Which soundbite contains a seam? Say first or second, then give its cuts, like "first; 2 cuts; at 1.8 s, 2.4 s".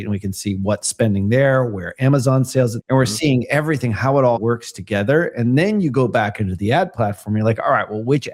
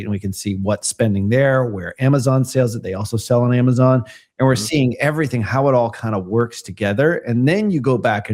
first; 2 cuts; at 2.8 s, 4.4 s